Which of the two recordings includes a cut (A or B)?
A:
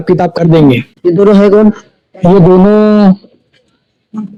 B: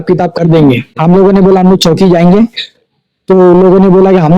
B